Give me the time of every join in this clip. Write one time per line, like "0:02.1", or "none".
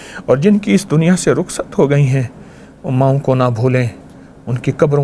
none